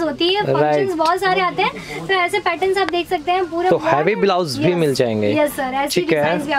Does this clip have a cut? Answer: no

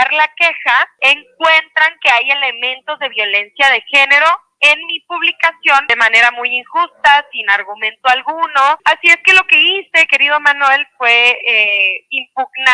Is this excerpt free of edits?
no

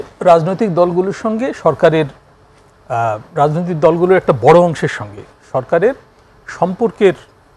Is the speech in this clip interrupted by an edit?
no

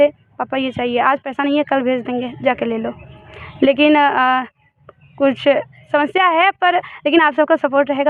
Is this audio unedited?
yes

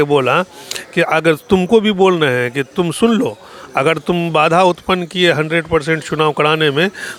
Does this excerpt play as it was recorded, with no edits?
yes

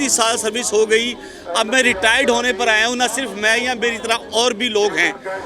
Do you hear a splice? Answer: no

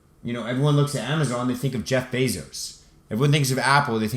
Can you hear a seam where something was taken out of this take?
no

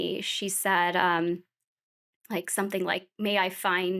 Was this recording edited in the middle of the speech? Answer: no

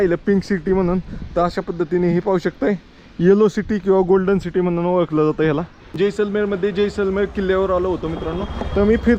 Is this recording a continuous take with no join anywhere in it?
no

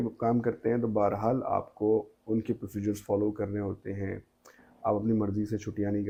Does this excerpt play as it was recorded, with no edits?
yes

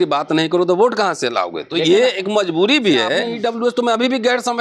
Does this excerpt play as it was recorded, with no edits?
no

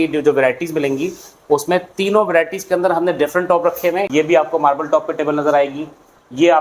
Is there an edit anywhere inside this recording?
yes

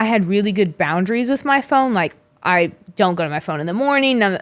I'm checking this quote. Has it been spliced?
no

